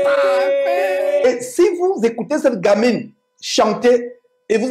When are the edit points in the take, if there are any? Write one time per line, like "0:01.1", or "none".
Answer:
0:01.2